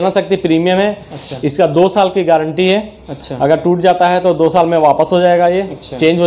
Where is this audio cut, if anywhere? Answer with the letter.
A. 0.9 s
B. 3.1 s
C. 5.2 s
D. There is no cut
D